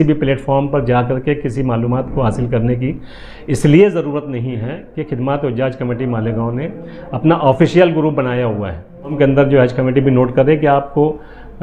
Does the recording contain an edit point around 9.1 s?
yes; 1 cut; at 9.1 s

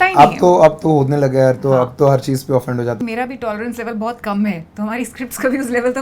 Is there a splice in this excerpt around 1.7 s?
no; 1 cut; at 3.0 s

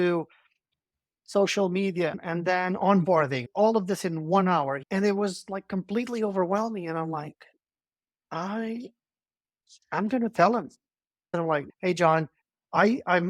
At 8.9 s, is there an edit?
no; 3 cuts; at 3.5 s, 4.8 s, 11.5 s

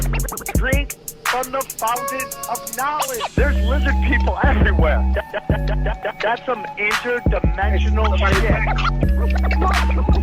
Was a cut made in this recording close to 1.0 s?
yes; 1 cut; at 1.0 s

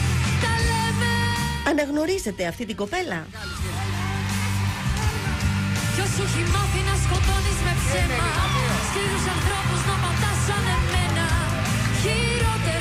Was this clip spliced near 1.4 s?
yes; 1 cut; at 1.4 s

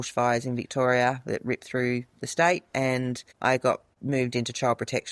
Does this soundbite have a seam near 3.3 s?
yes; 2 cuts; at 3.3 s, 3.9 s

